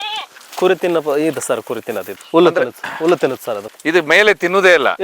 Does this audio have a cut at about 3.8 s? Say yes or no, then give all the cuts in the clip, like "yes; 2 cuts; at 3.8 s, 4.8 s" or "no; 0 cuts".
no; 1 cut; at 2.1 s